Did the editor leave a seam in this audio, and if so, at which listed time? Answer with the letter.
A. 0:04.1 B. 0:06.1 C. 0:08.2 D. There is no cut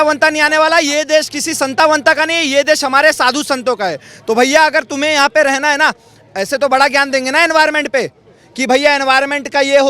D